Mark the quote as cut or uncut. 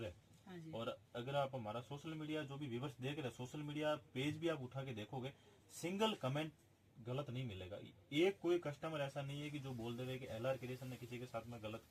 uncut